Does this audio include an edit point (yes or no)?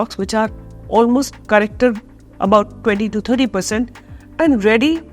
no